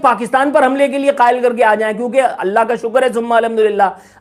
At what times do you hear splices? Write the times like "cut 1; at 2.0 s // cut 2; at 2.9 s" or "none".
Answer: none